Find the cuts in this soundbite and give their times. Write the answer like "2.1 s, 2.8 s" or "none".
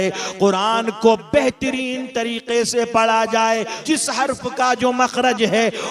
3.7 s